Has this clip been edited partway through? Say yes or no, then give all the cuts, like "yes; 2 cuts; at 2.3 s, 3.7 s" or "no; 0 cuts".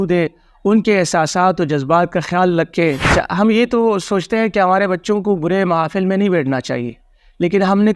yes; 1 cut; at 3.0 s